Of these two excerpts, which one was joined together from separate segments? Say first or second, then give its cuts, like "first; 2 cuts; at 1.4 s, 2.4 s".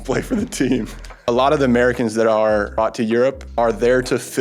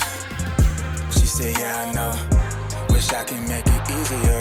first; 3 cuts; at 1.1 s, 2.8 s, 3.5 s